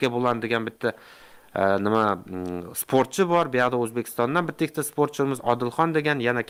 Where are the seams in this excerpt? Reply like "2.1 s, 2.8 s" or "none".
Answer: none